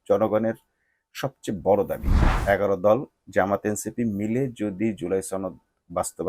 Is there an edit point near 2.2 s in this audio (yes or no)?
yes